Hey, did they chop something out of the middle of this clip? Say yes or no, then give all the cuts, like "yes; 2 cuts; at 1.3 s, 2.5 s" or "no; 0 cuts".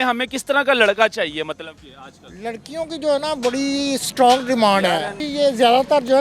yes; 1 cut; at 5.2 s